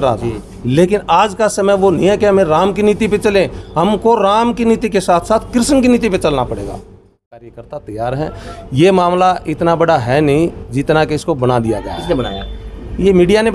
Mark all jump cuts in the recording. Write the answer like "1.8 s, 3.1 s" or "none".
7.4 s

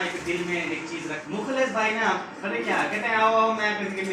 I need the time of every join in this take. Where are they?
1.2 s

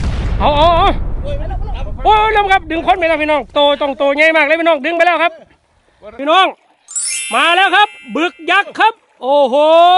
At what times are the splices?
6.0 s

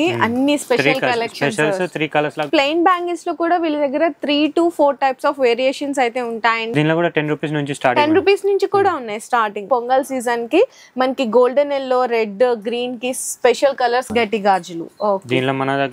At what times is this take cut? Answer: 2.5 s, 6.7 s, 9.6 s, 14.1 s

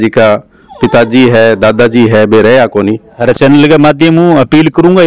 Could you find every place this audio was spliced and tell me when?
3.1 s

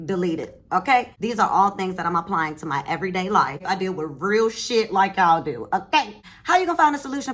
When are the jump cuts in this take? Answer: 1.2 s, 3.6 s, 6.2 s

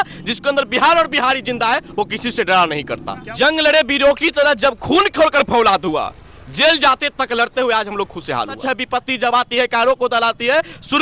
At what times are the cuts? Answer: 3.2 s, 8.6 s

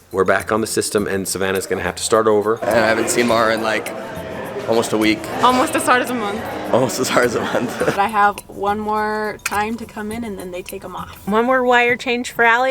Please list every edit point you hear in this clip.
2.6 s, 5.3 s, 7.9 s, 11.1 s

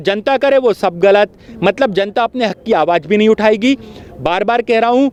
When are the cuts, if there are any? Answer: none

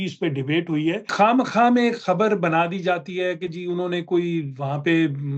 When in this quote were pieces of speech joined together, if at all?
1.1 s

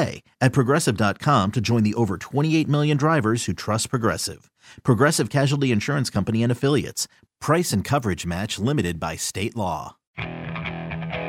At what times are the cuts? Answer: 10.0 s

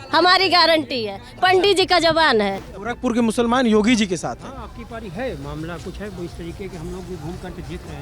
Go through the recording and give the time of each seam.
2.7 s

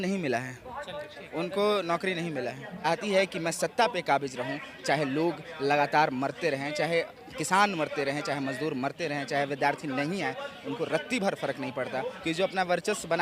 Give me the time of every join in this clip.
2.9 s, 12.2 s

